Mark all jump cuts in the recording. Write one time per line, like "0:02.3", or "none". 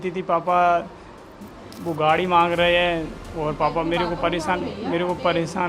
0:03.2

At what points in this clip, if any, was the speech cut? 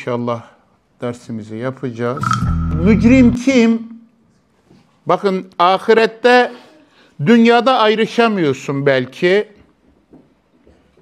0:02.7

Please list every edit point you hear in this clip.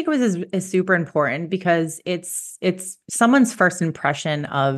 none

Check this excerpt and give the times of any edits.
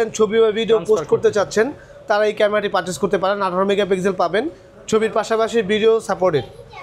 none

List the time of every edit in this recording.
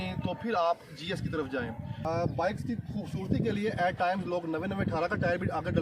0:01.9

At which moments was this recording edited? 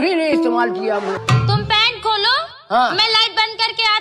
0:01.2

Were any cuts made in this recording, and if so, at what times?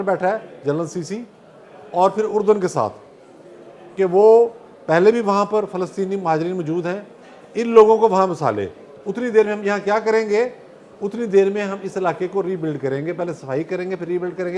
none

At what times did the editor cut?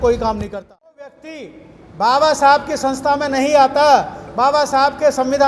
0:01.2

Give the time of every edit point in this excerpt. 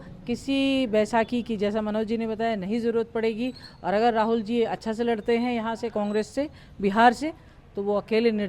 none

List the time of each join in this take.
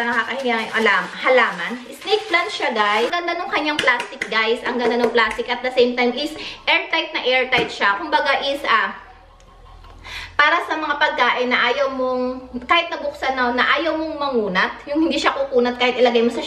0:03.1

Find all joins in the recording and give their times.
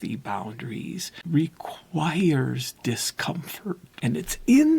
0:01.1
0:03.9

